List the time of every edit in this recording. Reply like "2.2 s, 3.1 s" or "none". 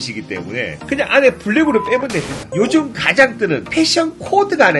2.4 s